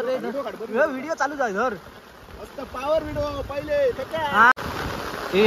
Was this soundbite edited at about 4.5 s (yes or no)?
yes